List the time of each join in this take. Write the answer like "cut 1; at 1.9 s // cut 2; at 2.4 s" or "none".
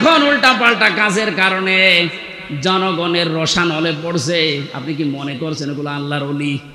none